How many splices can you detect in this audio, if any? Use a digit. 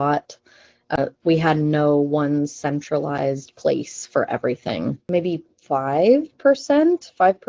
1